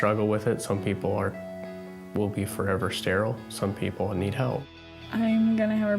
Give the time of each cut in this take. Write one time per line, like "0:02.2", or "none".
0:04.7